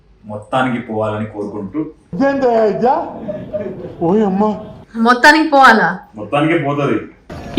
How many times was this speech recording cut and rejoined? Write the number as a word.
one